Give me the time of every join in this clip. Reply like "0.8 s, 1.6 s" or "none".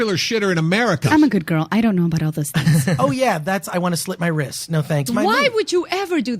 1.0 s, 3.0 s, 5.1 s